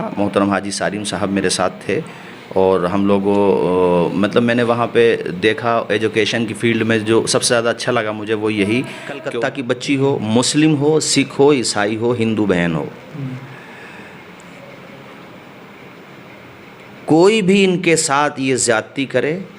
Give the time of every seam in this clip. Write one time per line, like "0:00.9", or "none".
0:09.2